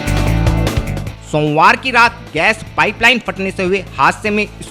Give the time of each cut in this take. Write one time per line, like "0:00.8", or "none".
none